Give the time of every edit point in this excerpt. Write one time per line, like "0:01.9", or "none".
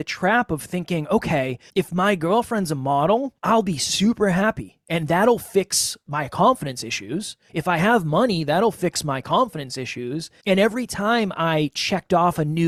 none